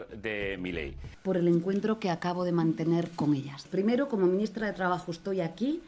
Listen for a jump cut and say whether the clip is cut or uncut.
cut